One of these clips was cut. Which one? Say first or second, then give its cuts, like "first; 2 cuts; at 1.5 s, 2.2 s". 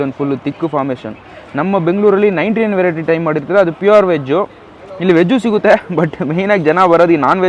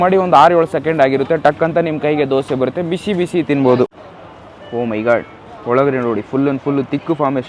second; 1 cut; at 3.9 s